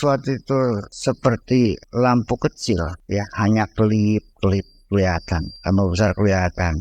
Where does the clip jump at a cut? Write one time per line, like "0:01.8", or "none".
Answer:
0:00.9
0:01.8
0:03.0
0:05.5